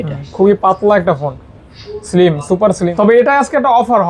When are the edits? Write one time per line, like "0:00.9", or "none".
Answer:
0:02.9